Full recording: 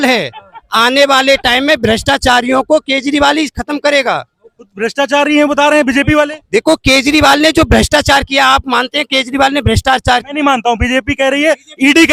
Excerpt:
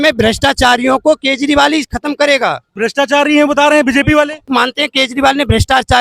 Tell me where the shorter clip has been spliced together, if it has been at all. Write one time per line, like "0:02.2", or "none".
0:02.7
0:04.5